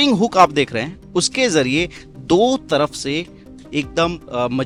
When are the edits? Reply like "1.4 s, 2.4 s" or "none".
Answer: none

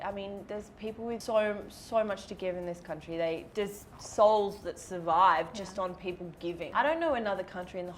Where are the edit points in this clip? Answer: 1.2 s, 3.5 s, 6.6 s

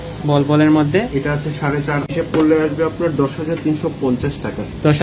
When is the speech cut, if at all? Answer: 2.1 s

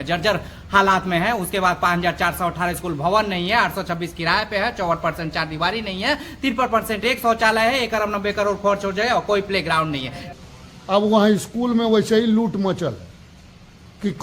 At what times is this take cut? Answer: 10.2 s

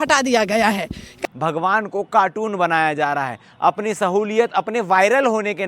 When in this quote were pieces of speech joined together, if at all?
1.1 s

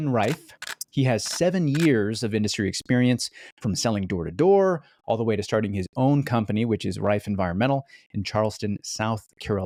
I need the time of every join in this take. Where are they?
none

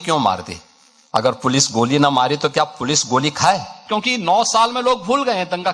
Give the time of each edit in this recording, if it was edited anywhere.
3.8 s

